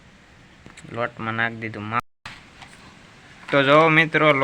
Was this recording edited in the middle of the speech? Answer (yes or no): yes